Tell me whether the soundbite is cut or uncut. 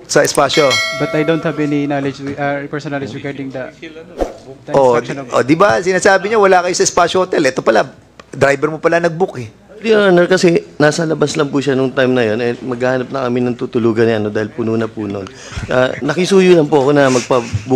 cut